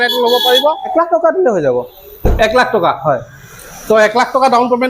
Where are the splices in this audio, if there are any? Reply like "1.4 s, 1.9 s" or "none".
0.9 s